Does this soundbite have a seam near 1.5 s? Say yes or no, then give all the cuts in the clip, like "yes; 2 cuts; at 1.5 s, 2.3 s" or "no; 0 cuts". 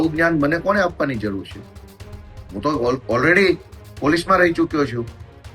no; 0 cuts